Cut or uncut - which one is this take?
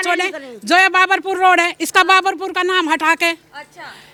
uncut